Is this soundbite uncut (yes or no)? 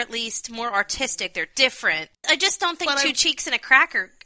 no